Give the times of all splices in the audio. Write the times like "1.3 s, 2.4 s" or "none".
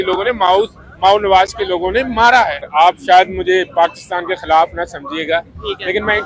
2.6 s